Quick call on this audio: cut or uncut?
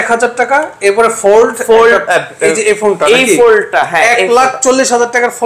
uncut